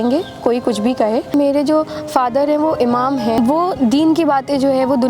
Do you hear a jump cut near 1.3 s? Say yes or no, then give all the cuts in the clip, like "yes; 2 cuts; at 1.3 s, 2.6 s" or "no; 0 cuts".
yes; 2 cuts; at 1.3 s, 3.6 s